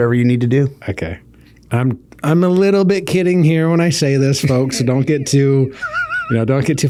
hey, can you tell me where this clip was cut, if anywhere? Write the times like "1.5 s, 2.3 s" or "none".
none